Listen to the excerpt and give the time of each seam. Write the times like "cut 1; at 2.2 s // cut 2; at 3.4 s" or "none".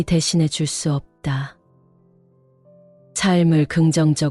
cut 1; at 1.8 s // cut 2; at 3.1 s